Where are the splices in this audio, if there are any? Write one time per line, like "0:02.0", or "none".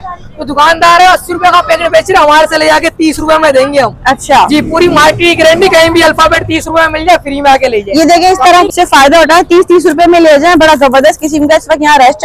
0:08.7